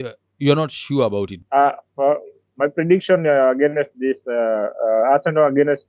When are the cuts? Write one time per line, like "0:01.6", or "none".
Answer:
0:01.4